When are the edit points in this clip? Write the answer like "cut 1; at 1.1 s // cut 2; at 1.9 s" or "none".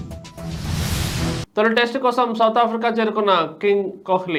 none